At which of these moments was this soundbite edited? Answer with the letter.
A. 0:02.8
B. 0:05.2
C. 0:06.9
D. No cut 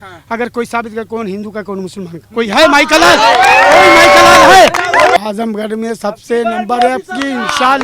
B